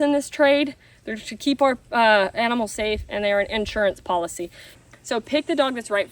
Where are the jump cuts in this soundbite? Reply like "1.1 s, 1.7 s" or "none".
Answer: 4.7 s